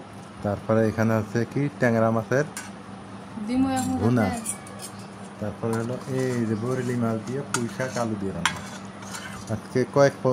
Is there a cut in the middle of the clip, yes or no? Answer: no